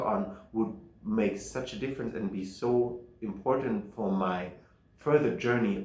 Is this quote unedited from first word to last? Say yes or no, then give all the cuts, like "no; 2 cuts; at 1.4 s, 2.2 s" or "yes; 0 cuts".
yes; 0 cuts